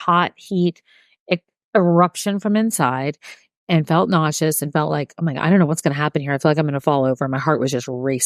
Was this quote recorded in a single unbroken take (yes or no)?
yes